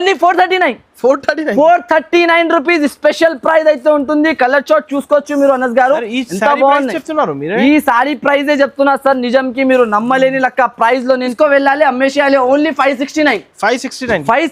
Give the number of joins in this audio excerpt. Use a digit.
1